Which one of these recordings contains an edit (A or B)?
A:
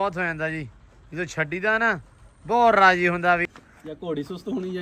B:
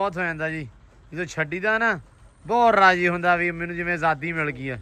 A